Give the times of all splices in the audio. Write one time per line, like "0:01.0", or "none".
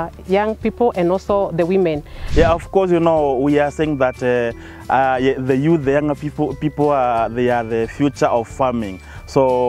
0:02.1